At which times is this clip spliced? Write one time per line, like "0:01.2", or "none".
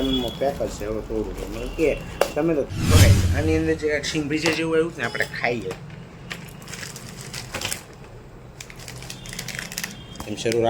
none